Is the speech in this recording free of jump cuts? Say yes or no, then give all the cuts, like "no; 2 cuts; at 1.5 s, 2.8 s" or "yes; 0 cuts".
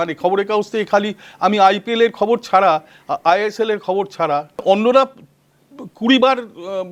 no; 1 cut; at 4.6 s